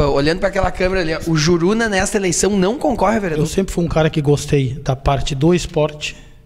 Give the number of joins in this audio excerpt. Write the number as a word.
one